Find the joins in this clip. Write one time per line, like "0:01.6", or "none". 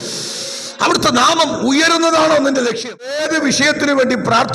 0:03.2